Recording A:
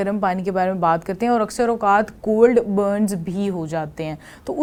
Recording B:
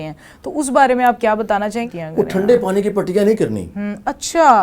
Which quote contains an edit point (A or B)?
B